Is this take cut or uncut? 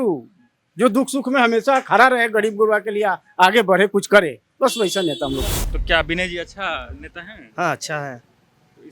cut